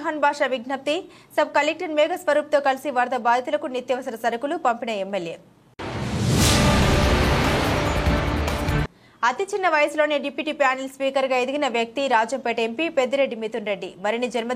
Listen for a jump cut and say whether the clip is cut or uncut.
uncut